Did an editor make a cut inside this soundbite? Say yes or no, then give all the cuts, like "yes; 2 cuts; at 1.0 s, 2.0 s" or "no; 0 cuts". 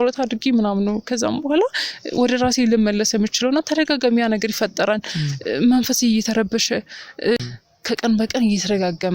yes; 1 cut; at 7.4 s